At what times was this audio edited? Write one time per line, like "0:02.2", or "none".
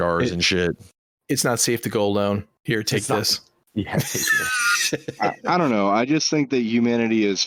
none